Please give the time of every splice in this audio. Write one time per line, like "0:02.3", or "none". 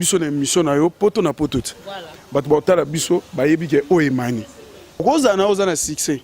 0:05.0

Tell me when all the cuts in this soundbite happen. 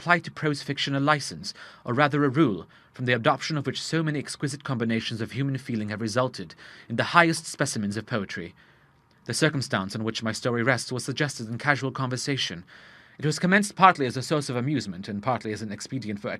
0:09.8

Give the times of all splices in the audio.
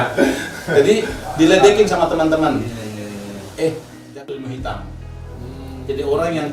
0:04.0

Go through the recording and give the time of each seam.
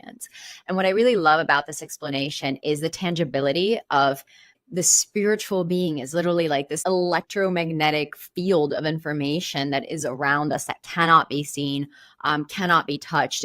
0:04.5
0:06.8

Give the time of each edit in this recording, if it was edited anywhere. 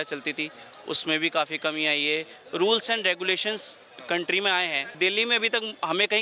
0:04.9

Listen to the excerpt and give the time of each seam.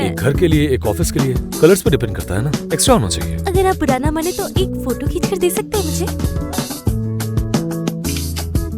0:06.7

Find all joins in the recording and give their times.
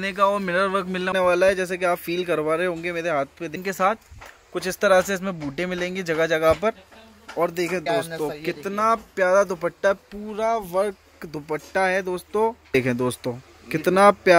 0:01.1
0:03.6
0:07.8
0:12.7

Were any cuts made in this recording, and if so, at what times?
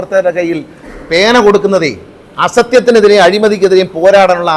none

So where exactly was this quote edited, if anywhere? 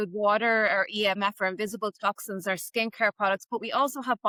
none

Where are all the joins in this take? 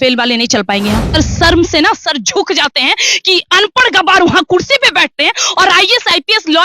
0:01.1

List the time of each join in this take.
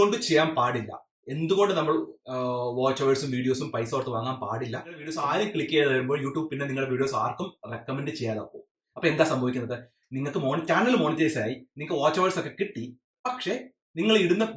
0:05.1

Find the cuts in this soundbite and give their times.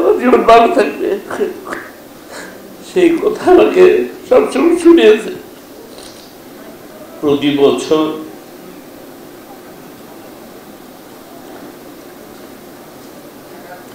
0:06.4

